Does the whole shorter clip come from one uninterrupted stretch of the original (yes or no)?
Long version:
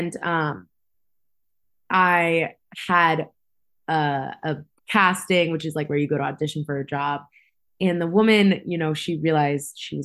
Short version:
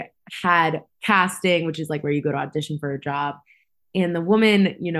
no